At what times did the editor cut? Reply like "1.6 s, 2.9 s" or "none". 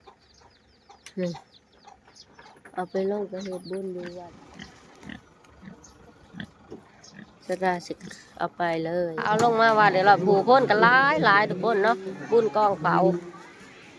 4.2 s, 9.2 s